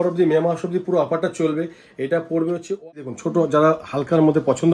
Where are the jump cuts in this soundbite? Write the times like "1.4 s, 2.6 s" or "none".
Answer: 3.0 s